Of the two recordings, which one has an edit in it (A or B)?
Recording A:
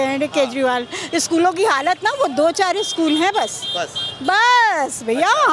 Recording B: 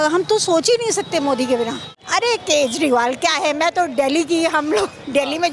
B